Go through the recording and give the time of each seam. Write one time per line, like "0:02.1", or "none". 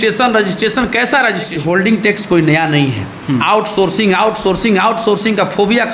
0:01.6